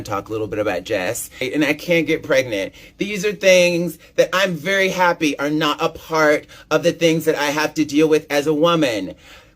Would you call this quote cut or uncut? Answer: cut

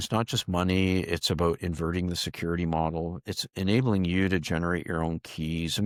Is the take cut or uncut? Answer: uncut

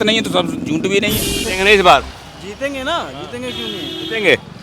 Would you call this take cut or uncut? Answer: cut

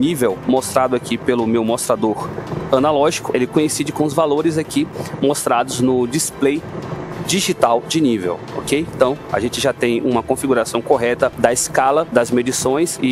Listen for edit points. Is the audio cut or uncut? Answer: uncut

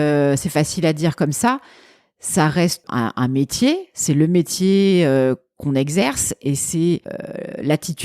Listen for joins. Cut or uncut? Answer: cut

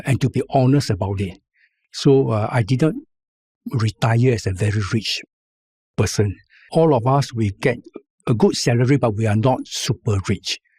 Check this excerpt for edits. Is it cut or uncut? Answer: cut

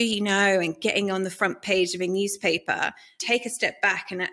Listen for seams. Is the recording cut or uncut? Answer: cut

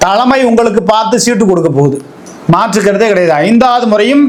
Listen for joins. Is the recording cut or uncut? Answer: uncut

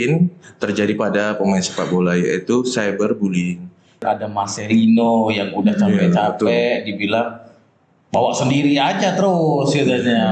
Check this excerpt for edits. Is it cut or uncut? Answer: cut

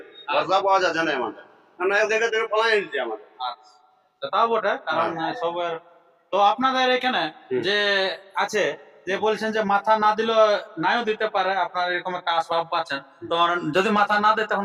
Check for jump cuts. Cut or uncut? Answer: uncut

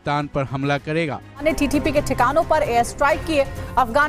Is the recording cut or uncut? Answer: cut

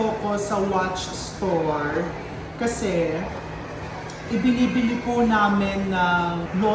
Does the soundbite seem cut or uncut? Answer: uncut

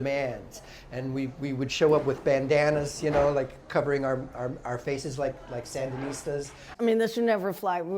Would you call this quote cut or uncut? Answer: cut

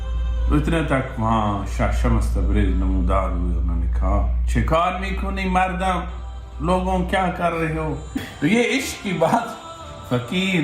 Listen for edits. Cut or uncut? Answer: cut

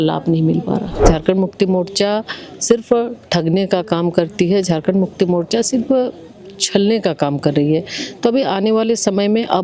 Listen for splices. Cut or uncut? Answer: cut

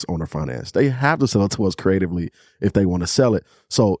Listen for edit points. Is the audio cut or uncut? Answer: uncut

